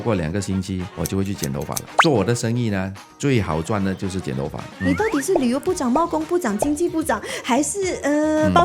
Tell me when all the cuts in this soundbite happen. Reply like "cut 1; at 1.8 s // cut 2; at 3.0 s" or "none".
cut 1; at 0.9 s // cut 2; at 4.7 s